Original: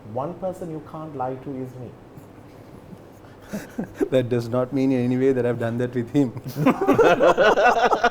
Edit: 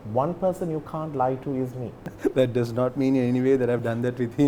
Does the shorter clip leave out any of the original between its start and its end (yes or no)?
yes